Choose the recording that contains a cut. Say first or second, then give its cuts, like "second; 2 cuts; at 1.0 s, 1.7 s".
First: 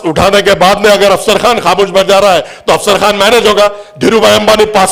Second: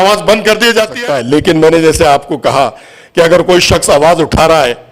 second; 1 cut; at 0.9 s